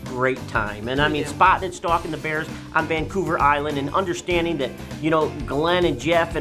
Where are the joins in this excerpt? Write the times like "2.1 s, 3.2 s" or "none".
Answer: none